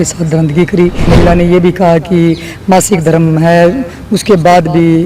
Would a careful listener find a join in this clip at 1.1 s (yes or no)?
yes